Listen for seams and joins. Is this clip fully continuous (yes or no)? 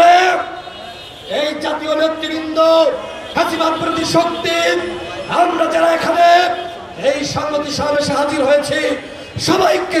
yes